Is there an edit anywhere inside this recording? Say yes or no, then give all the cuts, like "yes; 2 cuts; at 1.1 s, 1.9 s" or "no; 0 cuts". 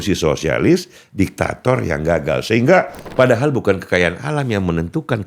yes; 1 cut; at 3.0 s